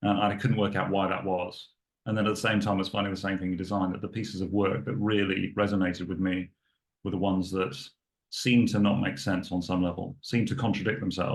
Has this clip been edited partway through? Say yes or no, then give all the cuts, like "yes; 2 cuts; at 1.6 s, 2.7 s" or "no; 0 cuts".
no; 0 cuts